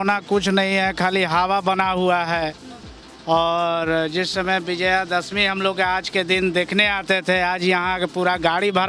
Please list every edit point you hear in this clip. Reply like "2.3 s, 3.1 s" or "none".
none